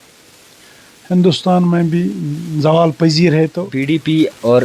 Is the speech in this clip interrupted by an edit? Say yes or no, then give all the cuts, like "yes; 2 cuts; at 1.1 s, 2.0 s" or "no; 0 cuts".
yes; 1 cut; at 3.7 s